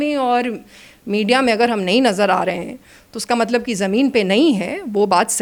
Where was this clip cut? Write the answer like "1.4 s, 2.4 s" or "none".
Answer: none

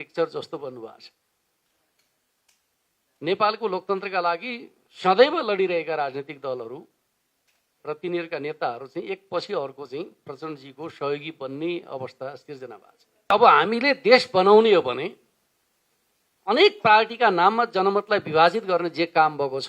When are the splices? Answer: 13.3 s

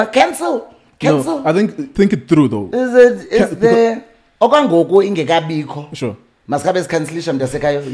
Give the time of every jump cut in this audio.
1.9 s

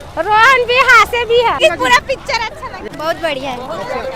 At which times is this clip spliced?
1.6 s, 2.9 s

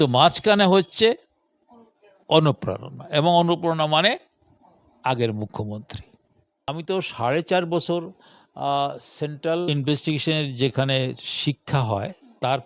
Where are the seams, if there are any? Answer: 6.7 s, 9.7 s

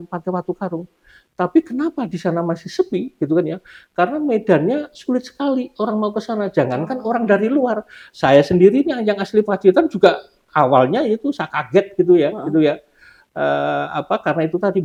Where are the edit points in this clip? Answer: none

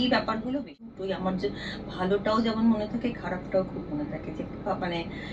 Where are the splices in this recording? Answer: 1.0 s

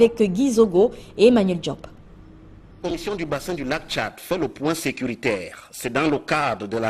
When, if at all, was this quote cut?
none

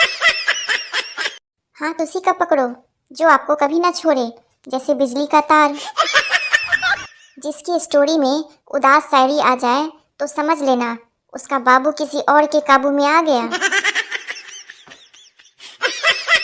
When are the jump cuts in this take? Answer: none

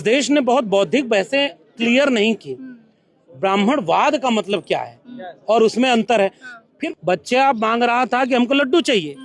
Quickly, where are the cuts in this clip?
6.8 s

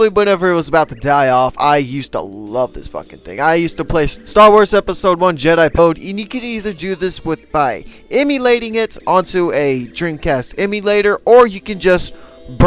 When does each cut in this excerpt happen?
none

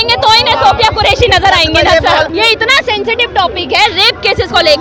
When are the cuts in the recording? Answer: 2.3 s

